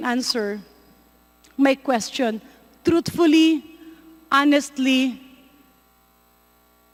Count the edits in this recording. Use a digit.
0